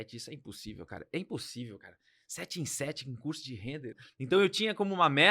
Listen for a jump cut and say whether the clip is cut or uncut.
cut